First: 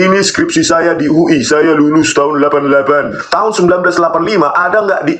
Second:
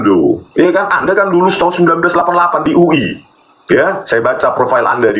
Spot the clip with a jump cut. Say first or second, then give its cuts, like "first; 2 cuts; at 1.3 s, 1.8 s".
first; 1 cut; at 3.2 s